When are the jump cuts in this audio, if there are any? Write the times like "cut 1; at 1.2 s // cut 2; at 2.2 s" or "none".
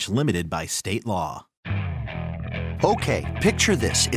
cut 1; at 1.5 s